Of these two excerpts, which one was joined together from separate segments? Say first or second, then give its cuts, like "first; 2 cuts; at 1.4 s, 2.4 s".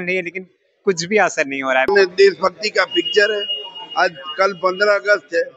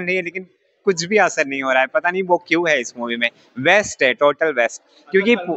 first; 1 cut; at 1.9 s